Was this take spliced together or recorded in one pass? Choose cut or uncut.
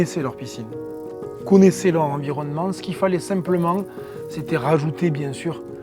uncut